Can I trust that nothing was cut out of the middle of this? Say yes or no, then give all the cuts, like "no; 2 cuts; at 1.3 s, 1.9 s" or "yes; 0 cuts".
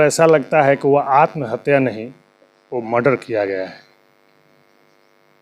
yes; 0 cuts